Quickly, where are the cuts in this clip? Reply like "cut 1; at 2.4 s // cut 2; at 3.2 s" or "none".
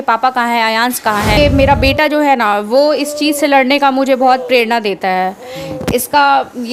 cut 1; at 1.4 s

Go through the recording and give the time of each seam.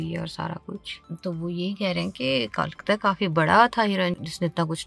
cut 1; at 1.0 s

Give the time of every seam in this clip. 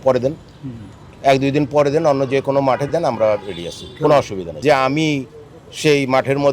cut 1; at 4.4 s

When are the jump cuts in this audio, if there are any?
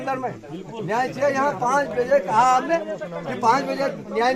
none

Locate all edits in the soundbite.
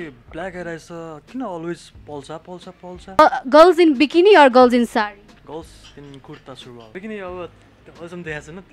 cut 1; at 3.2 s // cut 2; at 5.3 s // cut 3; at 6.9 s

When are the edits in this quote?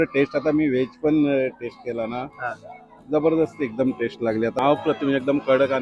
none

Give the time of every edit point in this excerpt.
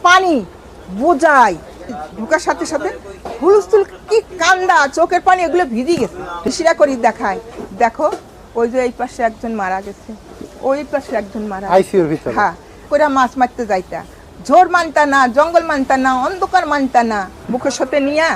cut 1; at 2.0 s // cut 2; at 6.4 s // cut 3; at 12.9 s // cut 4; at 17.4 s

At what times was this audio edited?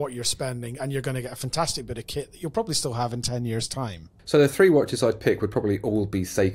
cut 1; at 4.1 s

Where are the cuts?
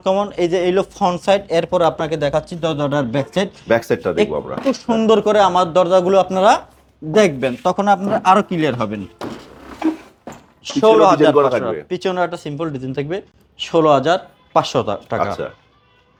none

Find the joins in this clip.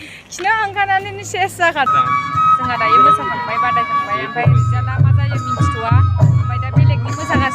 cut 1; at 1.9 s

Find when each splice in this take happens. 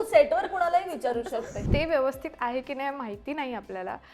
cut 1; at 1.6 s

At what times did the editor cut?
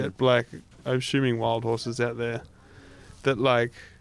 none

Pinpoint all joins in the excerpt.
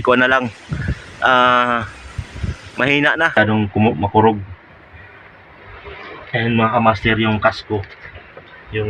cut 1; at 3.3 s

